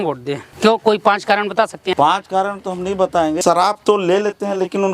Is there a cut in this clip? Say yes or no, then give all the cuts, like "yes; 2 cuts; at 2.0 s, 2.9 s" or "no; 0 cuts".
yes; 2 cuts; at 1.9 s, 3.4 s